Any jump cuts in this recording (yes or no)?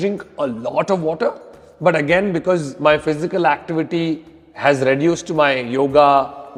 no